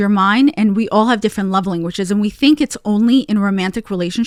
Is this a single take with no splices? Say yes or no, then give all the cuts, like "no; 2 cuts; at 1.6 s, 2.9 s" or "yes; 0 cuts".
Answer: yes; 0 cuts